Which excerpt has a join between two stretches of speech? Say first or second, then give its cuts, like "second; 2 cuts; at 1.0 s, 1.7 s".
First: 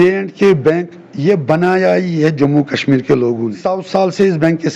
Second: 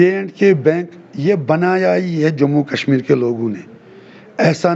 first; 1 cut; at 3.7 s